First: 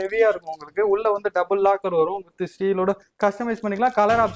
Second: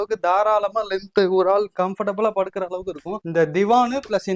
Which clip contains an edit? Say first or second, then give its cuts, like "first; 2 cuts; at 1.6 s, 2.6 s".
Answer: second; 1 cut; at 3.1 s